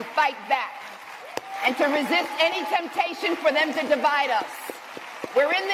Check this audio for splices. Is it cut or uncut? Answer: uncut